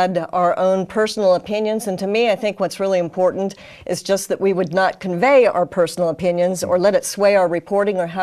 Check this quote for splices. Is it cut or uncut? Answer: uncut